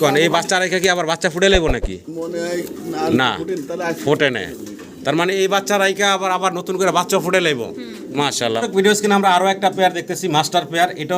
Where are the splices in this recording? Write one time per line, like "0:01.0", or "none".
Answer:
0:08.6